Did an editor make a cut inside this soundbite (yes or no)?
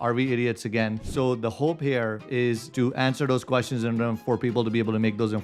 yes